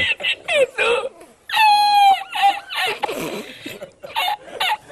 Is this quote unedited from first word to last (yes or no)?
yes